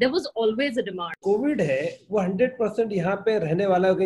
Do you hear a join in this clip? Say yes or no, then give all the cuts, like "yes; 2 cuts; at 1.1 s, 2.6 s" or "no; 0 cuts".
yes; 1 cut; at 1.2 s